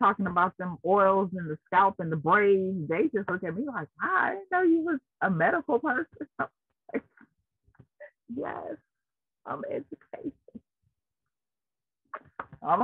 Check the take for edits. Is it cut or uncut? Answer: uncut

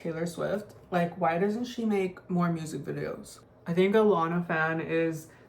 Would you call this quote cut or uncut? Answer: cut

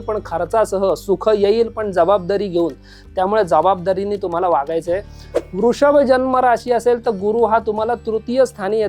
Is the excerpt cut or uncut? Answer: uncut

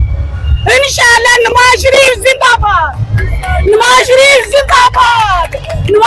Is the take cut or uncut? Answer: uncut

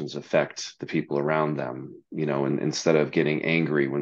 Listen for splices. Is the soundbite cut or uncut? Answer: uncut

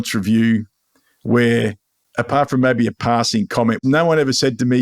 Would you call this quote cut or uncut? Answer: cut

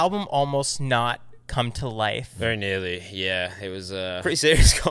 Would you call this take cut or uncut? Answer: cut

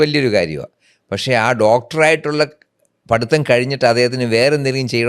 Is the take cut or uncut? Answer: uncut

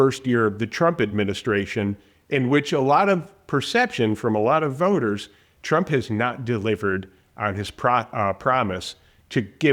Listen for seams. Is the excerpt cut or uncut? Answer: uncut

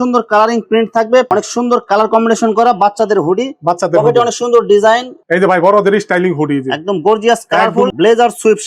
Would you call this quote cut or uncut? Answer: cut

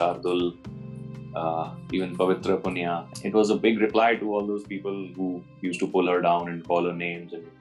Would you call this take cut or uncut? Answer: cut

